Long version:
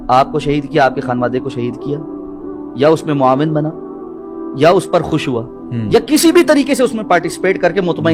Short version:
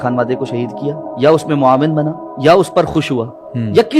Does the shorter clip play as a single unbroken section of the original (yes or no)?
no